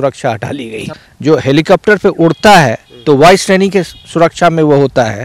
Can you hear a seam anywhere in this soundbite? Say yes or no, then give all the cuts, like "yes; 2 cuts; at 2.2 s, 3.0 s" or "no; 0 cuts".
yes; 1 cut; at 0.9 s